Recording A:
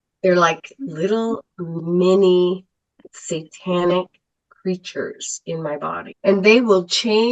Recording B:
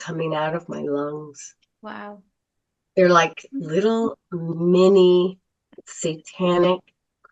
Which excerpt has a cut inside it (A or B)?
A